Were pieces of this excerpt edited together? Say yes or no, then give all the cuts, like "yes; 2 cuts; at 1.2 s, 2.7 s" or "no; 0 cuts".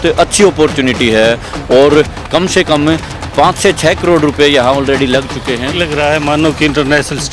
yes; 1 cut; at 5.7 s